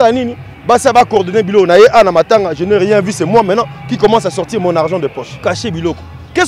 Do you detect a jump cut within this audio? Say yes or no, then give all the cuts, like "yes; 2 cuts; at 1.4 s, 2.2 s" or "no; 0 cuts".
yes; 1 cut; at 5.4 s